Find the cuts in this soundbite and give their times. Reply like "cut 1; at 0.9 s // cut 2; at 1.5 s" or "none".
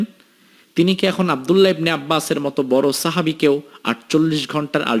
none

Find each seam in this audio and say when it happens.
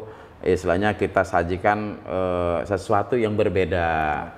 none

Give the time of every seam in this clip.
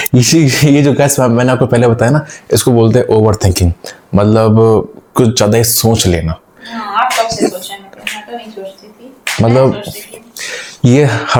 none

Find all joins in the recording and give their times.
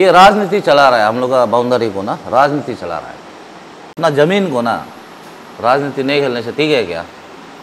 cut 1; at 4.0 s

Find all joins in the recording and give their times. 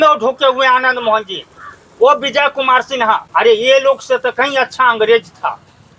cut 1; at 3.2 s

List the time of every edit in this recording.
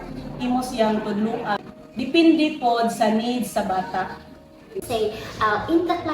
cut 1; at 1.6 s // cut 2; at 4.8 s

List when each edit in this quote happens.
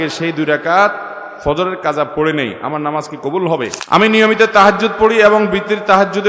cut 1; at 3.8 s

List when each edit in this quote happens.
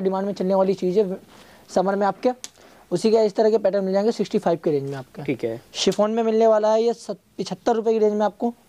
none

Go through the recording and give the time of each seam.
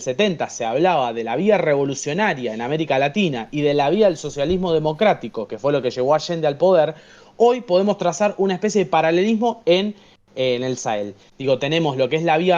none

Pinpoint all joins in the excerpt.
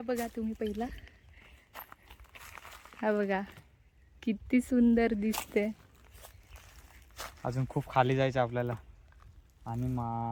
none

